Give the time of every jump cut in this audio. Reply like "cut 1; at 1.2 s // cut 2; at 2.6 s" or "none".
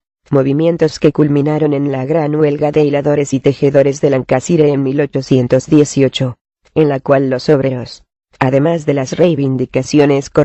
none